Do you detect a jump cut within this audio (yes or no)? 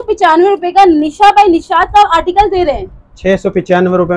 no